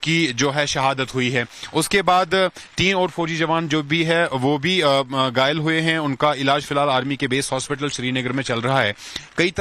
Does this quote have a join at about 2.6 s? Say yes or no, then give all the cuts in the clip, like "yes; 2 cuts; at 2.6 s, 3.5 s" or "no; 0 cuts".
yes; 1 cut; at 2.6 s